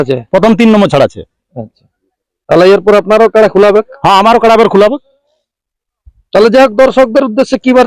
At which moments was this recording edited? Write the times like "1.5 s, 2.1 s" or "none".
none